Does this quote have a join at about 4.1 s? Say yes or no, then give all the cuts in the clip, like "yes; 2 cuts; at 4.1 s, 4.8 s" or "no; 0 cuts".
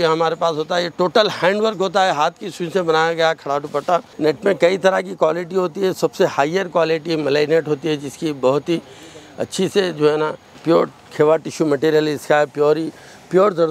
yes; 2 cuts; at 4.1 s, 10.5 s